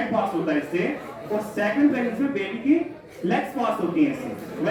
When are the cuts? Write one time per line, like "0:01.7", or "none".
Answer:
none